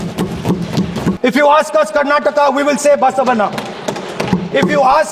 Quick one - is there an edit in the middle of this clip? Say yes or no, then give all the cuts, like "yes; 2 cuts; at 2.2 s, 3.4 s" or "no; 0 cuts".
yes; 1 cut; at 1.2 s